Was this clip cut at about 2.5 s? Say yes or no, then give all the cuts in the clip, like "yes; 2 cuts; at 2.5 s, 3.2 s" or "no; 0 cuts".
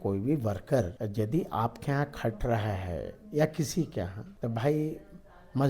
no; 2 cuts; at 1.0 s, 4.2 s